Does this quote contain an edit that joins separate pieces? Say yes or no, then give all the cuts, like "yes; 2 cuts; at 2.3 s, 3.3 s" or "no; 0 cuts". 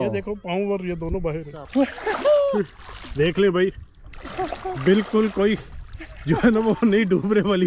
yes; 1 cut; at 1.6 s